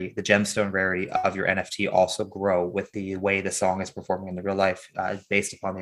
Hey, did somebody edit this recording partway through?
yes; 1 cut; at 2.9 s

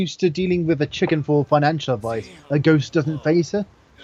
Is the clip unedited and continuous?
yes; 0 cuts

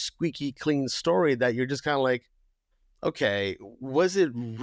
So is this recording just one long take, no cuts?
yes; 0 cuts

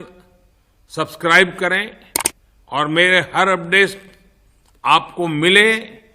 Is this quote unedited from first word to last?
yes; 0 cuts

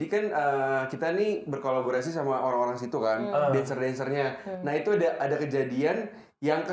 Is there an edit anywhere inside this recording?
no; 0 cuts

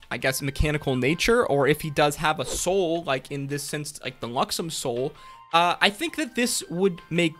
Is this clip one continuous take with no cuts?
yes; 0 cuts

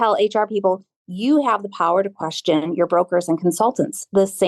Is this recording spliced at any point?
no; 0 cuts

